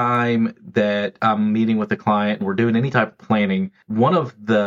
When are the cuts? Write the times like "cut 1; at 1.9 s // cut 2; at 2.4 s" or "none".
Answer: cut 1; at 1.1 s // cut 2; at 3.8 s